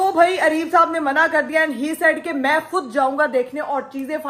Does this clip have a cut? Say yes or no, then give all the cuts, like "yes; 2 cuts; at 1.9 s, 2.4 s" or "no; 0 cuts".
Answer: no; 0 cuts